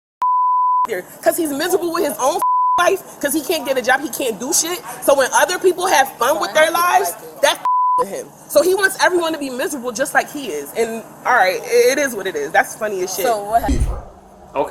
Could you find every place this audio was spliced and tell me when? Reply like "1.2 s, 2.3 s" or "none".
13.7 s